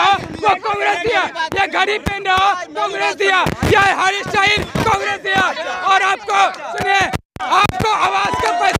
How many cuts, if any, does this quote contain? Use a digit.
0